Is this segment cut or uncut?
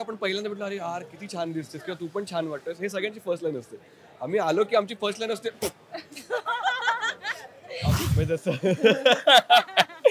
cut